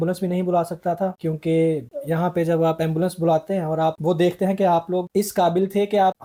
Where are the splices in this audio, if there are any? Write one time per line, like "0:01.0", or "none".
none